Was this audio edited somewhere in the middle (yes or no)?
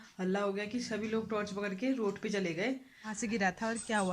yes